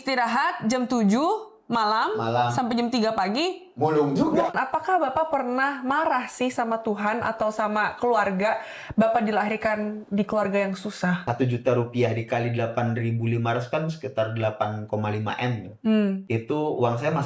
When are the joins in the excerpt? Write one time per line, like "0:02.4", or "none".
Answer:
0:04.5
0:11.3
0:16.2